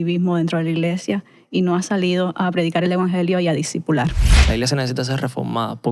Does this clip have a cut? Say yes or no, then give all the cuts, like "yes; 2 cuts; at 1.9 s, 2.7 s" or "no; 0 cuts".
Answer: yes; 1 cut; at 4.3 s